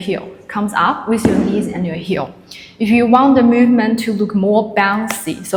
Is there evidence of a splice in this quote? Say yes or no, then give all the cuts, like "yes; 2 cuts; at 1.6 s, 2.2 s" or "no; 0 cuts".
no; 0 cuts